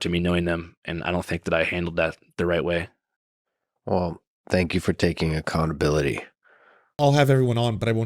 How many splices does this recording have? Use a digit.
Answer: 1